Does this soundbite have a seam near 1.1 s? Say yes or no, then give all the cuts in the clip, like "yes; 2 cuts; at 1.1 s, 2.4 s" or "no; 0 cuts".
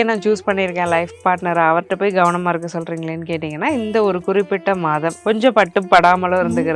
no; 1 cut; at 5.2 s